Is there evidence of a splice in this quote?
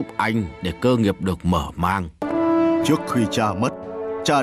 yes; 1 cut; at 2.2 s

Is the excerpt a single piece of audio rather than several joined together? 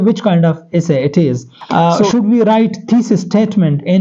no; 1 cut; at 1.5 s

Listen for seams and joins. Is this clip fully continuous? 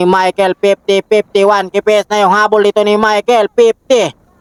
yes; 0 cuts

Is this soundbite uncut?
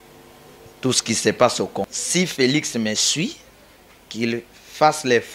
no; 1 cut; at 1.9 s

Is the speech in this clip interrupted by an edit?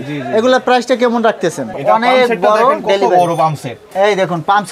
yes; 1 cut; at 1.7 s

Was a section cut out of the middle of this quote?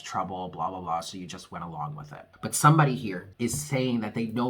yes; 2 cuts; at 2.2 s, 3.2 s

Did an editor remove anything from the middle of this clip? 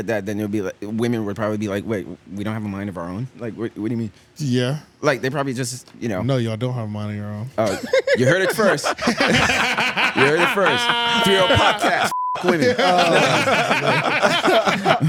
no; 0 cuts

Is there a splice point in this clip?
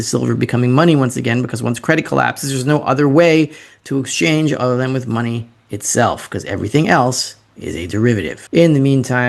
yes; 1 cut; at 8.3 s

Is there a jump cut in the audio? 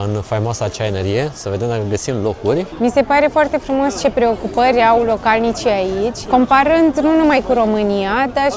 yes; 2 cuts; at 2.7 s, 6.2 s

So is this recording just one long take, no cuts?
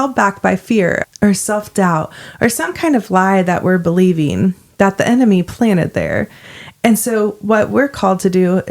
no; 1 cut; at 1.0 s

